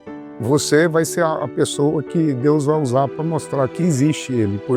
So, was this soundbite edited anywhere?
no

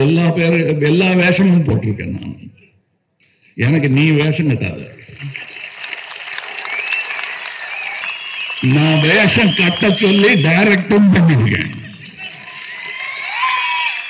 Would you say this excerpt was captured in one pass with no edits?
no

